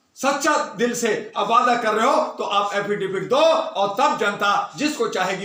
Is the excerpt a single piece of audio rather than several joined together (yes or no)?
yes